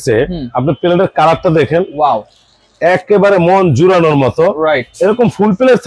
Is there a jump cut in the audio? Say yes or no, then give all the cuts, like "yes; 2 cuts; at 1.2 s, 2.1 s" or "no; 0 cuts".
no; 0 cuts